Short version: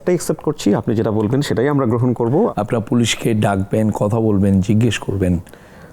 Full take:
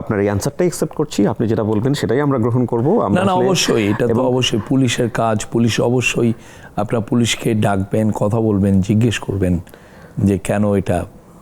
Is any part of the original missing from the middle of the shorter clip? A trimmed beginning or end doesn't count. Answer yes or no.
yes